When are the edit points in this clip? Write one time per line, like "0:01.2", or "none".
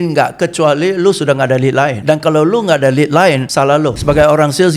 0:02.0
0:03.6

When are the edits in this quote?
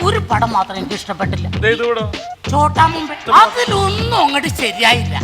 0:01.5
0:03.1

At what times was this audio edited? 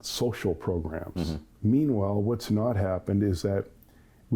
0:01.5

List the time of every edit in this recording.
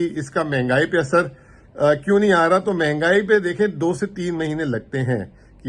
none

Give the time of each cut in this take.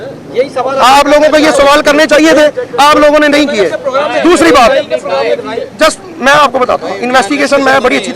none

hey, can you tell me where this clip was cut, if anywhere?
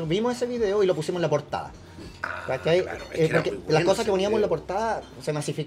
none

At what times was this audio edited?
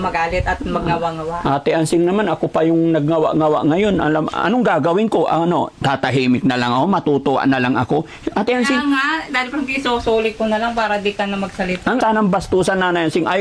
0:12.0

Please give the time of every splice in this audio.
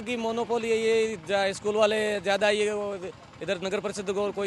none

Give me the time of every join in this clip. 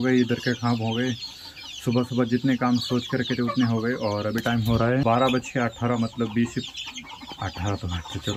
none

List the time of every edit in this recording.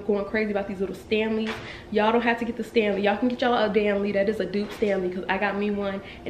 none

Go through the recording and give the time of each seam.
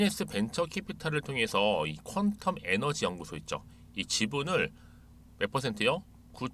none

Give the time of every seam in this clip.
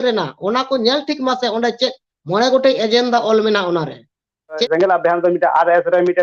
0:04.6

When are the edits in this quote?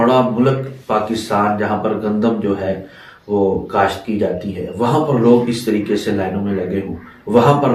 none

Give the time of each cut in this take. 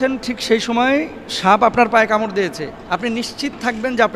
0:03.2

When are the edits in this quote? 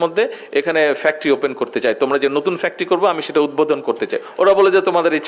none

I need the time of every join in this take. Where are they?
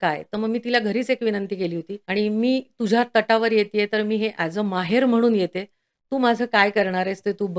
0:01.9

